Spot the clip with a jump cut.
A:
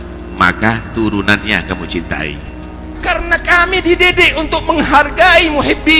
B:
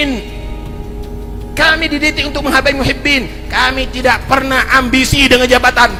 A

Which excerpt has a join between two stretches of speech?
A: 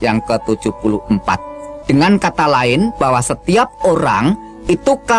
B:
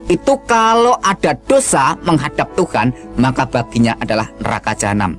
A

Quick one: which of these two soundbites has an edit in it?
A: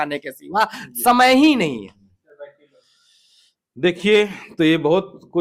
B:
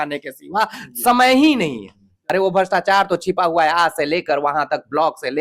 B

